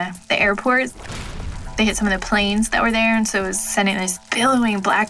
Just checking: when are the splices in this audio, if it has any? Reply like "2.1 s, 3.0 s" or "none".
none